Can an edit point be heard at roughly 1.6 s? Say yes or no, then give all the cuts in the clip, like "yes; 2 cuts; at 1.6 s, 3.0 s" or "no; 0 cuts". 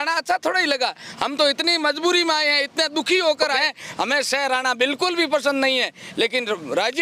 no; 1 cut; at 3.5 s